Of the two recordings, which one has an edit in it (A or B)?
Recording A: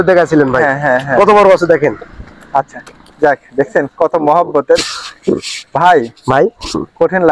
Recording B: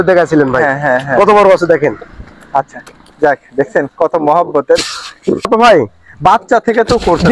B